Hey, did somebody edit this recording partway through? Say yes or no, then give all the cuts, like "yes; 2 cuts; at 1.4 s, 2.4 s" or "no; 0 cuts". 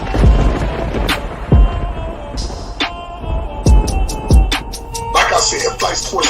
no; 0 cuts